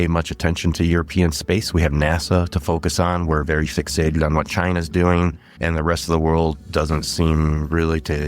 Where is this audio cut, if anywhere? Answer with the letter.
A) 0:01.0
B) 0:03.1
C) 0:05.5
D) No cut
C